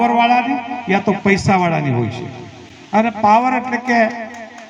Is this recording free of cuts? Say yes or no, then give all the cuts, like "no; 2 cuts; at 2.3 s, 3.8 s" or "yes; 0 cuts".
yes; 0 cuts